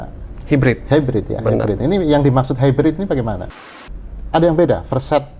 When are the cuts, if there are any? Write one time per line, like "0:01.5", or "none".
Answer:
0:03.6